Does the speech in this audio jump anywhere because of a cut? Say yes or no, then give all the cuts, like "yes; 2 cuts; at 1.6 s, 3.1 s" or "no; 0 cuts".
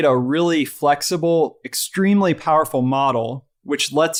no; 0 cuts